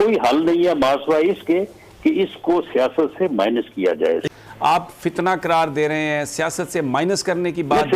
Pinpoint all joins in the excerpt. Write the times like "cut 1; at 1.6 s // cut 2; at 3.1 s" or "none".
cut 1; at 4.2 s